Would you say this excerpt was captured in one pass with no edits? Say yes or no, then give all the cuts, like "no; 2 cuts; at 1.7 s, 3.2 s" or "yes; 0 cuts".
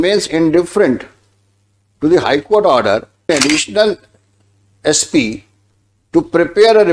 no; 1 cut; at 3.3 s